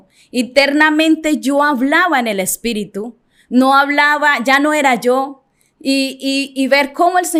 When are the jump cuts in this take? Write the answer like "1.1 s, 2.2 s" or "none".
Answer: none